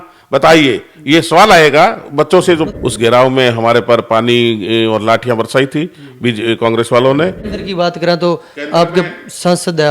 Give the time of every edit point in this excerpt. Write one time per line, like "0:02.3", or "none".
0:02.6
0:07.5